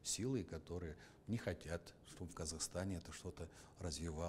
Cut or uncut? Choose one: uncut